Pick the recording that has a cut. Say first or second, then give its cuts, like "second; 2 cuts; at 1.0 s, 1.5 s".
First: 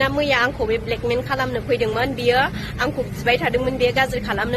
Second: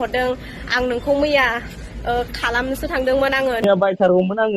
second; 1 cut; at 3.6 s